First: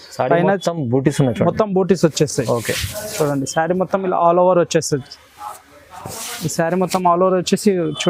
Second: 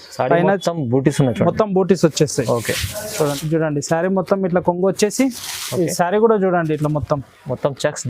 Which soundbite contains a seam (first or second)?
second